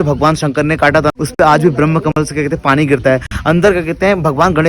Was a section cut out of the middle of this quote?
yes; 1 cut; at 1.1 s

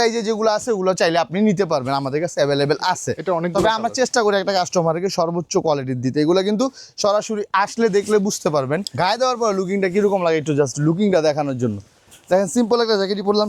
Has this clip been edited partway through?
yes; 1 cut; at 8.9 s

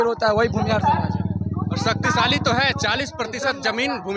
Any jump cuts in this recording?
no; 0 cuts

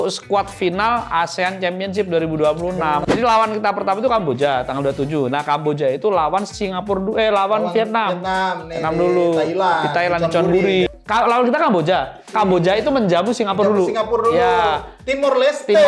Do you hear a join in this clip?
yes; 2 cuts; at 3.1 s, 10.9 s

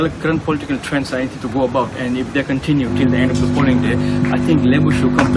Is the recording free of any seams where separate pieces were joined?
yes; 0 cuts

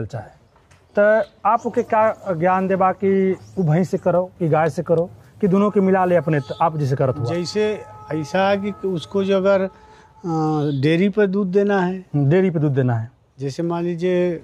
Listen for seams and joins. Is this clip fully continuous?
yes; 0 cuts

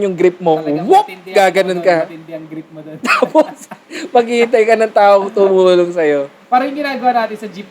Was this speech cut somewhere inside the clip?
no; 0 cuts

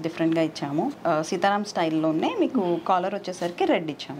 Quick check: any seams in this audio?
yes; 1 cut; at 0.9 s

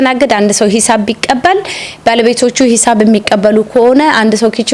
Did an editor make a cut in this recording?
no; 0 cuts

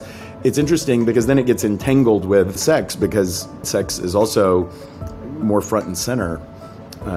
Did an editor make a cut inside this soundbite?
yes; 2 cuts; at 2.6 s, 3.6 s

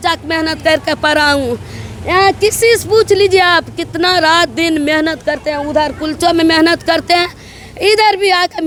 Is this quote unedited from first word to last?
yes; 0 cuts

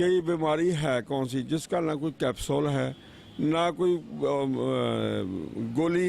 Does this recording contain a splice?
no; 0 cuts

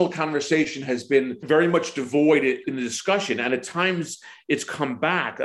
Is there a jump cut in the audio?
yes; 2 cuts; at 1.4 s, 2.6 s

